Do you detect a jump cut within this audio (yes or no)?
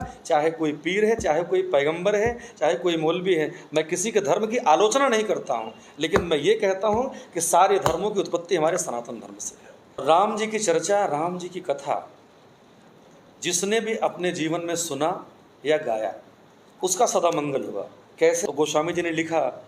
yes